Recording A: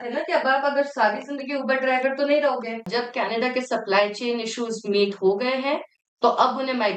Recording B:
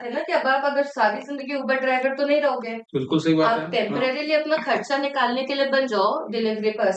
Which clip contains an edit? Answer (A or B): A